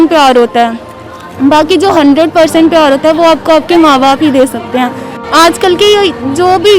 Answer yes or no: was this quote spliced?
yes